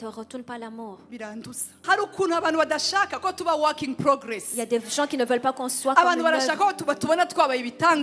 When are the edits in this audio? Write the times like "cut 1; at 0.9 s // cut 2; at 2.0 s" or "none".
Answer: cut 1; at 1.7 s